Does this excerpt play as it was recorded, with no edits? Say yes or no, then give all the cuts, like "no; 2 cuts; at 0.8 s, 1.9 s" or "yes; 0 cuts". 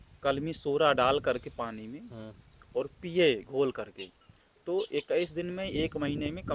yes; 0 cuts